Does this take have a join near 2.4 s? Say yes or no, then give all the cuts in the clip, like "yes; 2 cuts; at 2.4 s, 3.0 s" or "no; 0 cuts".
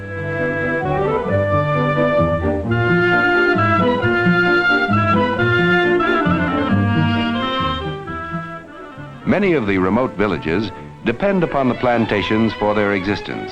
no; 1 cut; at 9.5 s